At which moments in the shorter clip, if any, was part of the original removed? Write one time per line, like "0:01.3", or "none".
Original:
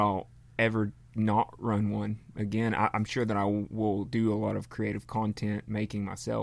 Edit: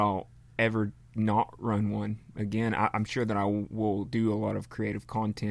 none